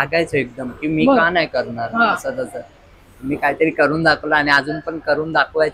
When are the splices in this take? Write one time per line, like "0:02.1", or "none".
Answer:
none